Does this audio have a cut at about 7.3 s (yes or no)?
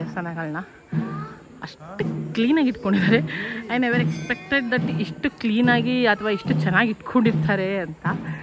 no